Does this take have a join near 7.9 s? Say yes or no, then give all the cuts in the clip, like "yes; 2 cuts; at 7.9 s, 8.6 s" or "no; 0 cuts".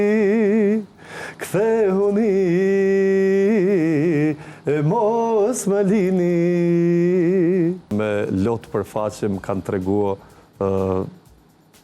yes; 1 cut; at 7.9 s